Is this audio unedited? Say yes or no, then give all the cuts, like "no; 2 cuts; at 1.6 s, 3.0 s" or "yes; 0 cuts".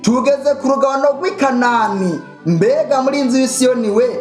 yes; 0 cuts